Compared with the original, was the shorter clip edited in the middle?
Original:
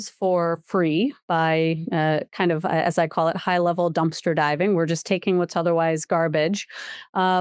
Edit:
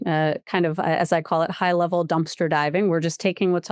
no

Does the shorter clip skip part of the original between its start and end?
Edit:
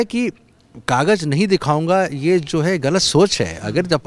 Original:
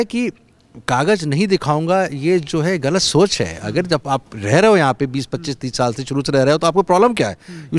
no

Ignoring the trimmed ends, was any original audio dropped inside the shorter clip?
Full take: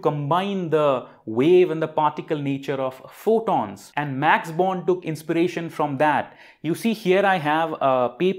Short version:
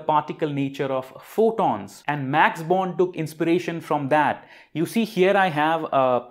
no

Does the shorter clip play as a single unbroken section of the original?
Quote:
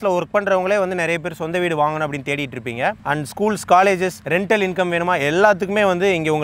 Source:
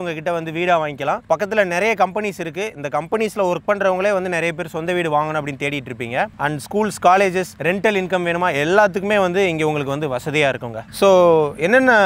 yes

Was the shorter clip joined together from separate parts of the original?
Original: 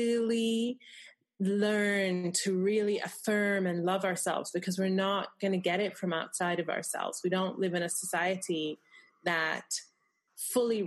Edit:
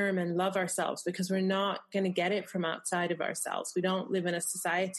no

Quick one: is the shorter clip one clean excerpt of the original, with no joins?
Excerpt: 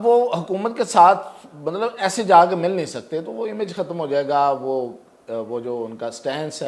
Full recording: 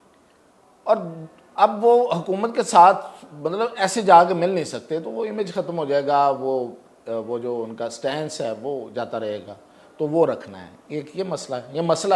yes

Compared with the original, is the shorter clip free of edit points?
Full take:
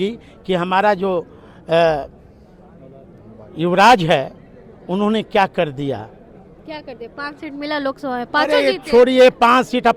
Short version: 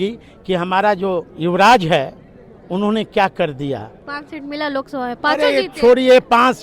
no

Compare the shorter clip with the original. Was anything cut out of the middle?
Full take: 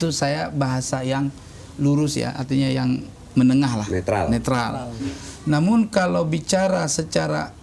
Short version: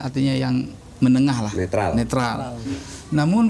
no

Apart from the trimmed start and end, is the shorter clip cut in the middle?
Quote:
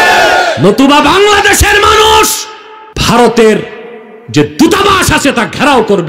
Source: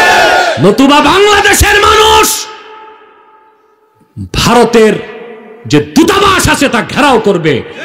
yes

